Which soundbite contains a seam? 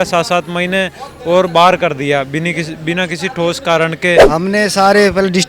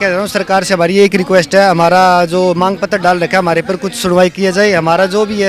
first; 1 cut; at 4.2 s

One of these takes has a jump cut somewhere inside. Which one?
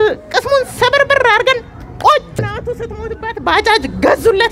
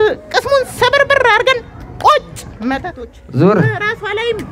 first; 1 cut; at 2.5 s

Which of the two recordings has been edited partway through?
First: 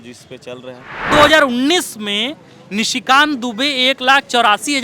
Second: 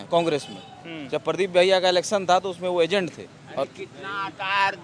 first; 1 cut; at 1.1 s

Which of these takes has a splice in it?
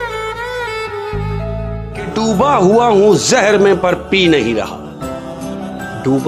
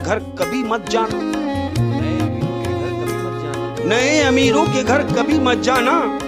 first; 1 cut; at 1.9 s

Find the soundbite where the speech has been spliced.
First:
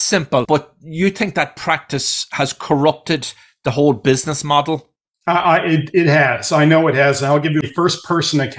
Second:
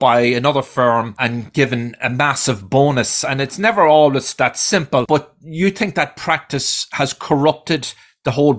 second; 1 cut; at 1.1 s

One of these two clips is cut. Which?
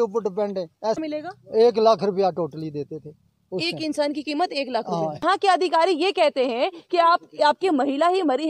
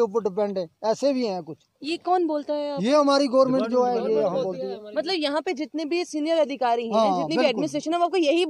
first; 2 cuts; at 1.0 s, 5.2 s

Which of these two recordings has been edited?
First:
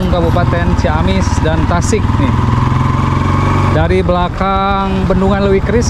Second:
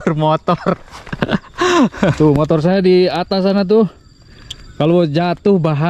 second; 1 cut; at 2.1 s

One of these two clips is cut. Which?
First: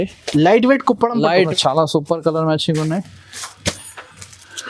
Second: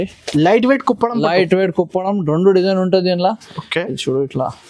first; 1 cut; at 1.5 s

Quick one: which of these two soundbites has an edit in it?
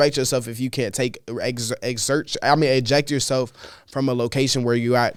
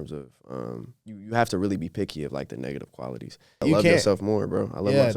second; 1 cut; at 3.6 s

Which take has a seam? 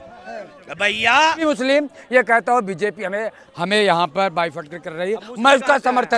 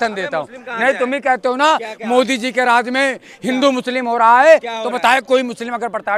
first; 1 cut; at 1.4 s

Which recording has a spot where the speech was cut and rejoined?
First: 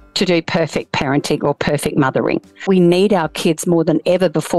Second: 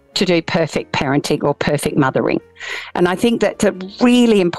first; 1 cut; at 2.5 s

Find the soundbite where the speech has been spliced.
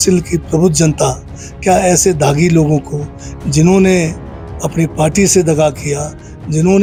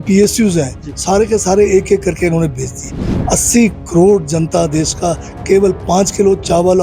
second; 1 cut; at 3.0 s

